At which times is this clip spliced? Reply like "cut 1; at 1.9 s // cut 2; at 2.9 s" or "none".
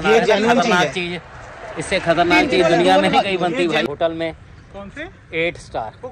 cut 1; at 3.9 s